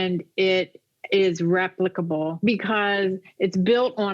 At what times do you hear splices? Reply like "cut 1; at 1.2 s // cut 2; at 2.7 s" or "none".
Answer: cut 1; at 2.3 s